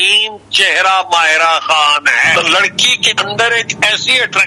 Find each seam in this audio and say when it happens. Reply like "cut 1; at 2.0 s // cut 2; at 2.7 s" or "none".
cut 1; at 2.3 s